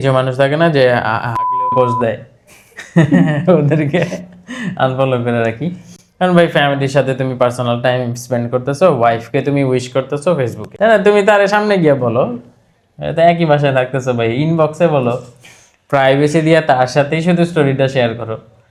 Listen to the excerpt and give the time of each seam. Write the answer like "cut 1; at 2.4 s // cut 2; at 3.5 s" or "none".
none